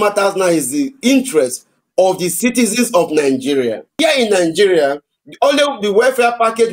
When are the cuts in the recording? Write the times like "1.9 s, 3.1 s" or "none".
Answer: 4.0 s